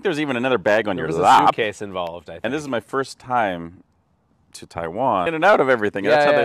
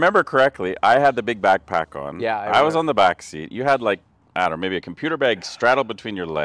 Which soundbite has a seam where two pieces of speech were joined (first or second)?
first